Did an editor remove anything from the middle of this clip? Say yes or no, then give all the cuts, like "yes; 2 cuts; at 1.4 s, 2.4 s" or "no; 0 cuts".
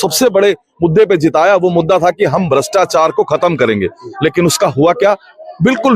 no; 0 cuts